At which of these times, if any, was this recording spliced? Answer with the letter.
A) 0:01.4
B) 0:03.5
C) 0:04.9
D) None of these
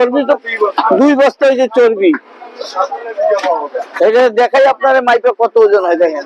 B